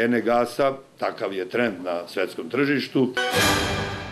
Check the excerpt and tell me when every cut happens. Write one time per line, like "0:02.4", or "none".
0:03.2